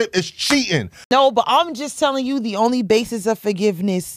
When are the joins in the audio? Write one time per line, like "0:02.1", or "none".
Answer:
0:01.1

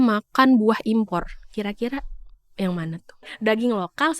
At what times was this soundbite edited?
0:03.3

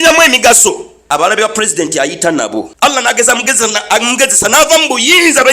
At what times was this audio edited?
0:01.0
0:03.0

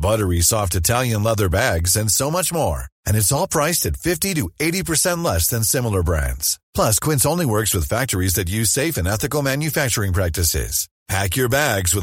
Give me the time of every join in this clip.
none

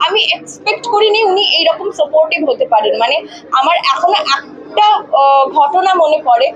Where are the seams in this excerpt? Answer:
none

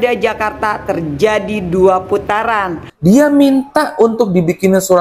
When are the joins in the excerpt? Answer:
0:02.8

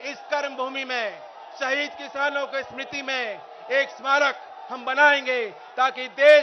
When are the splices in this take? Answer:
none

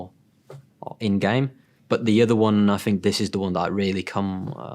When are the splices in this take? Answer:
0:01.7

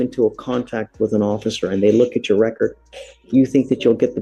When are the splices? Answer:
none

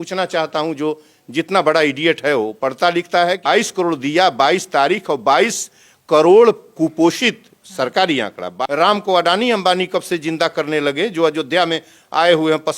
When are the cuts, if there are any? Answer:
0:03.5
0:08.5

